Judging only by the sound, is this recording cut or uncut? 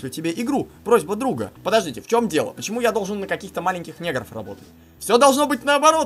cut